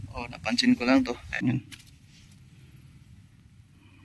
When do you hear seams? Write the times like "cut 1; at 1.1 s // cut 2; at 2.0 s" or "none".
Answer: cut 1; at 1.3 s